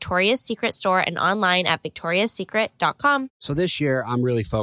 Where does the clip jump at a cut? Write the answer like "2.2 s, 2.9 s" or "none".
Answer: 3.3 s

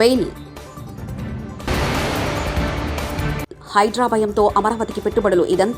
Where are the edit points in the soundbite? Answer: none

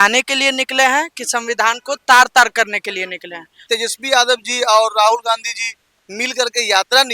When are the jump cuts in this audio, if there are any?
3.6 s

